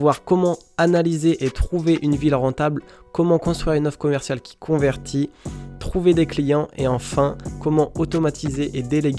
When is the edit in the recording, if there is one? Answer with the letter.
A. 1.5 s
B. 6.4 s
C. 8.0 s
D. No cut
D